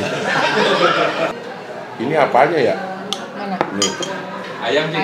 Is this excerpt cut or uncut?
cut